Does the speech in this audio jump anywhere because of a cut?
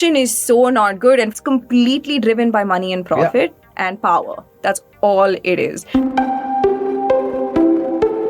yes; 1 cut; at 5.8 s

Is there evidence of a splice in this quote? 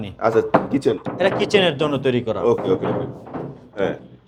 no; 0 cuts

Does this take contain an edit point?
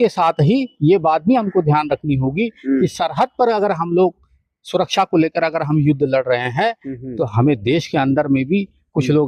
no; 0 cuts

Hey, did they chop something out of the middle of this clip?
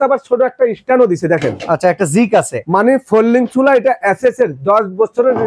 no; 0 cuts

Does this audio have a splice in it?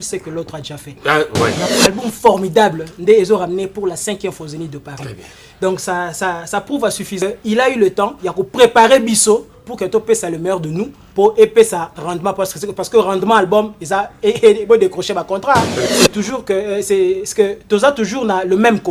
yes; 3 cuts; at 1.6 s, 7.2 s, 15.8 s

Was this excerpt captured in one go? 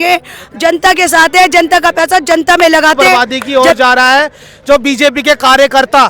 no; 1 cut; at 3.2 s

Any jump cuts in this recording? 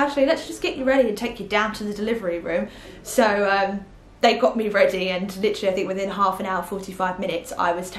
no; 0 cuts

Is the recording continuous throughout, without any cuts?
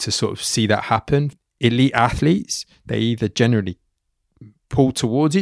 no; 1 cut; at 1.3 s

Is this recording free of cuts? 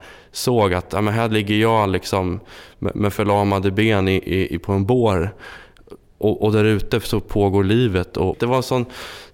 no; 1 cut; at 8.3 s

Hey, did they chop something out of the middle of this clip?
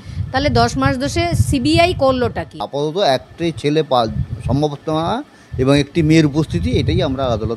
yes; 1 cut; at 2.7 s

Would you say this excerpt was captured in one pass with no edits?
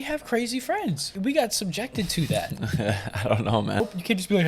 no; 2 cuts; at 1.1 s, 3.8 s

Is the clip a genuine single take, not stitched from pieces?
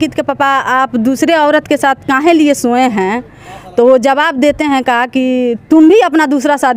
yes; 0 cuts

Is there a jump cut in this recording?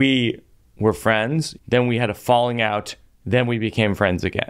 yes; 1 cut; at 1.5 s

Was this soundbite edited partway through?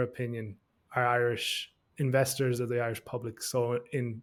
no; 0 cuts

